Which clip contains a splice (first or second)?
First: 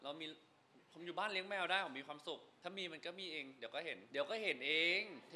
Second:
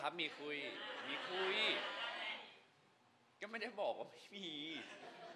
first